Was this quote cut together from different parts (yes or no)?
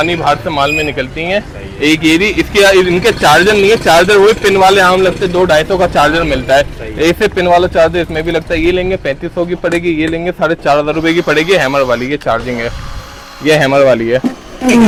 no